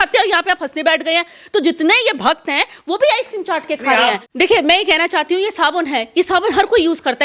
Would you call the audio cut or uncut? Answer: cut